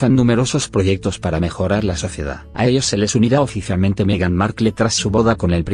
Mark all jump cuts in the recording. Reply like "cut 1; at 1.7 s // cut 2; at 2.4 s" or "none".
cut 1; at 4.2 s